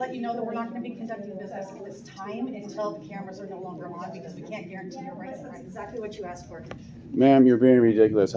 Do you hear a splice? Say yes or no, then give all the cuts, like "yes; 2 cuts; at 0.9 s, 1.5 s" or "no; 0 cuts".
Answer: yes; 1 cut; at 5.5 s